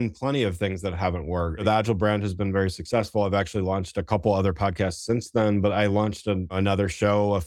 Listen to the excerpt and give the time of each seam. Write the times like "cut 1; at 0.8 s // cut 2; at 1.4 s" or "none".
cut 1; at 1.6 s // cut 2; at 6.5 s